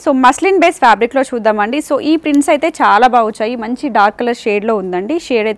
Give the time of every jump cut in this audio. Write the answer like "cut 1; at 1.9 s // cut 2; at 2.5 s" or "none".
none